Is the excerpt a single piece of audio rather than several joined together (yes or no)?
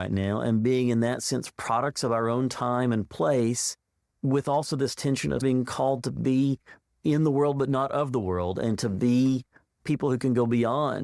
yes